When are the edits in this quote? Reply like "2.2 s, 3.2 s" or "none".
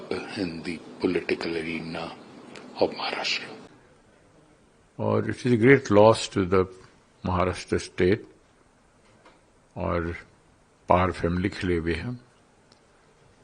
3.7 s